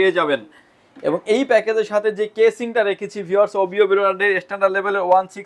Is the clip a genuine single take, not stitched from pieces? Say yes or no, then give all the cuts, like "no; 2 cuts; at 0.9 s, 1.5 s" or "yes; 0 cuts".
yes; 0 cuts